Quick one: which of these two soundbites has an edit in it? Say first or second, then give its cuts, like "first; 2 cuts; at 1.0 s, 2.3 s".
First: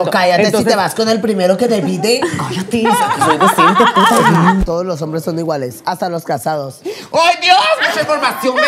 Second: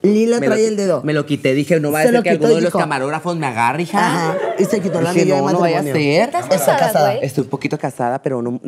first; 1 cut; at 4.6 s